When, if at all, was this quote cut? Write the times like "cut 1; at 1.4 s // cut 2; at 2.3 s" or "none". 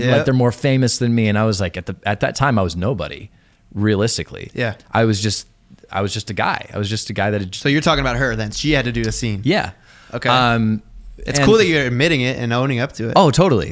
none